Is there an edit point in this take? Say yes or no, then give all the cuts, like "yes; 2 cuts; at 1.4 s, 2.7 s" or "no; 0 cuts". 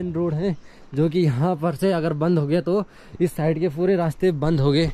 no; 0 cuts